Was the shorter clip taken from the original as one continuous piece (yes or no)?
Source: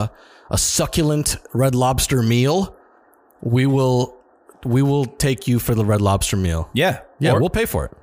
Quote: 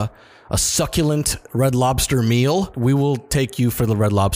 no